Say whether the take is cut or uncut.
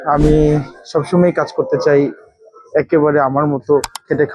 uncut